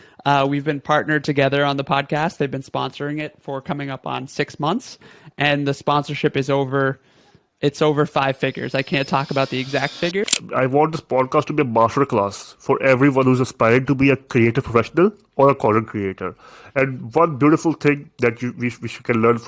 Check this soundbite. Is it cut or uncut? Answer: cut